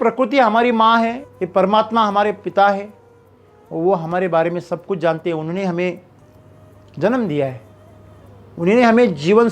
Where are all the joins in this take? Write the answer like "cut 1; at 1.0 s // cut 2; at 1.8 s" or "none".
cut 1; at 1.3 s